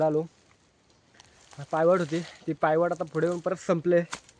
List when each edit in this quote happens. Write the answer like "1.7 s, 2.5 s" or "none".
none